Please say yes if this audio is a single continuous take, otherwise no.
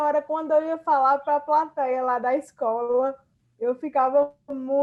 yes